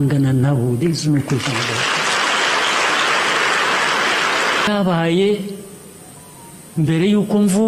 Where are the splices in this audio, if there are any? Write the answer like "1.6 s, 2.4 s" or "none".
4.7 s

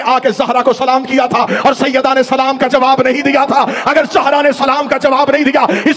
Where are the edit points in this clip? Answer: none

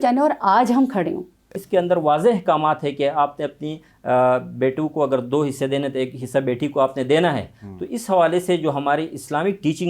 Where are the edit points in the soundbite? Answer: 1.5 s

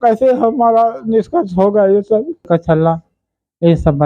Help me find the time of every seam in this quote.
2.5 s

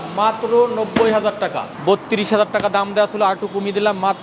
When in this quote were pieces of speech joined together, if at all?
1.7 s

